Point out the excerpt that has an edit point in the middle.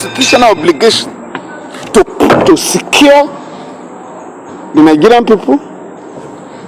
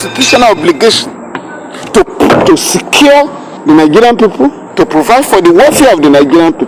second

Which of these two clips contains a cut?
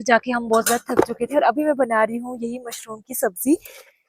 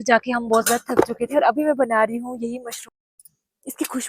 second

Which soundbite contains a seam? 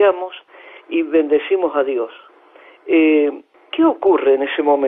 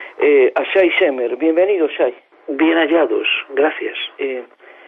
first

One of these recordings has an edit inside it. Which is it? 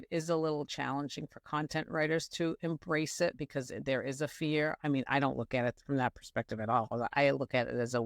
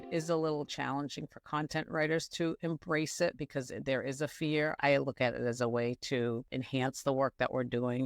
second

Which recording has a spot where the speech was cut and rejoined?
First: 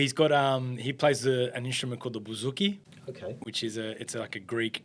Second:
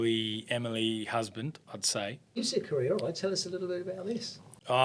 second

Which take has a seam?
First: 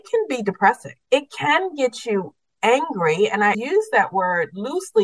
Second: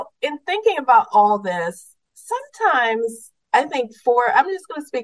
first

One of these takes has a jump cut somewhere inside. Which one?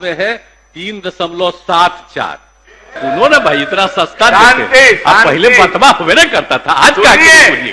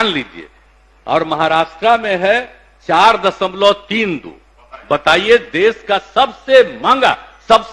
first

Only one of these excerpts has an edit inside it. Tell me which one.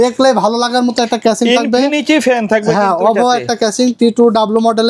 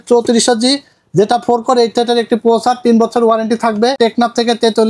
second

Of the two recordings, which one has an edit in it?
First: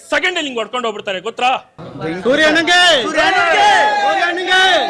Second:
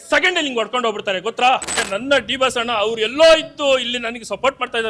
second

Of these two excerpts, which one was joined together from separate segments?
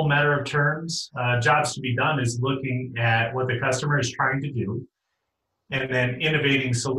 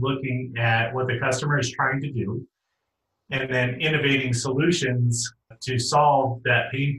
second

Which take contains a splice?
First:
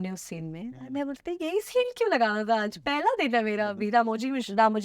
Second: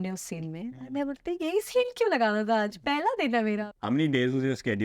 second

